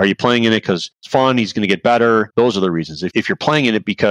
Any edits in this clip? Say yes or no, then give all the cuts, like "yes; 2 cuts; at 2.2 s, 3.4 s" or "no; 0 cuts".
yes; 1 cut; at 1.0 s